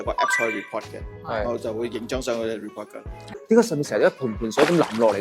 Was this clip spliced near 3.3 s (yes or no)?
yes